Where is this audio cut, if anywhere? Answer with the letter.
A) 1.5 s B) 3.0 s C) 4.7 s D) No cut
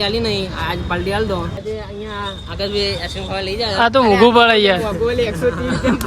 A